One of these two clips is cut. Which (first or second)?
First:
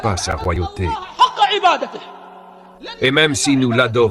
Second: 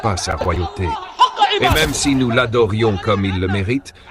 second